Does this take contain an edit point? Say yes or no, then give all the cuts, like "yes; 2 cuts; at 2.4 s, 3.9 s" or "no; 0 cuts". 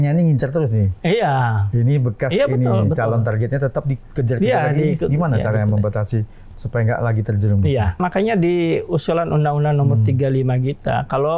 yes; 1 cut; at 8.0 s